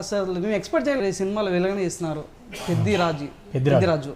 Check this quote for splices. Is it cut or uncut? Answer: cut